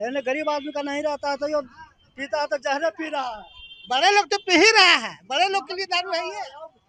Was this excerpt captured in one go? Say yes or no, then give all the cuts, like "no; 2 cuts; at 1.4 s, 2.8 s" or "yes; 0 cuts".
yes; 0 cuts